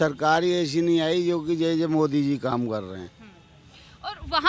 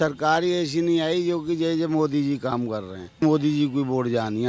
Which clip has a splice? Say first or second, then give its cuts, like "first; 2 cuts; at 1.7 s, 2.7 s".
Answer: second; 1 cut; at 3.2 s